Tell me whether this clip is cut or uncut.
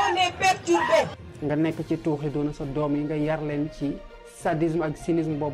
cut